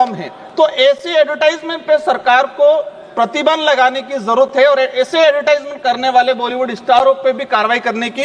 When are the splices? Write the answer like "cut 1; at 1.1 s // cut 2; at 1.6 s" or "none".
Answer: none